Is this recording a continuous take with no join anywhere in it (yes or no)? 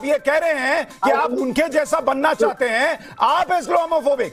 yes